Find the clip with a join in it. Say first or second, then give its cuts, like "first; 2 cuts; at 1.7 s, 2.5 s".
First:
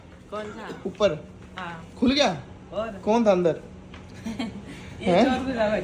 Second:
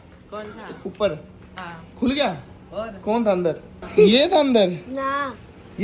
second; 1 cut; at 3.7 s